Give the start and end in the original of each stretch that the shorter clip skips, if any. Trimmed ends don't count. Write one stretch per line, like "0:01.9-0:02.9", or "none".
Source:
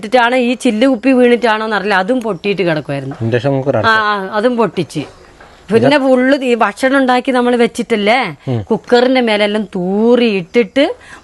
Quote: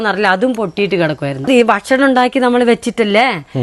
0:03.1-0:06.4